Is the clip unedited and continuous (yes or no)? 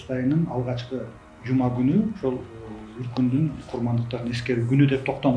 yes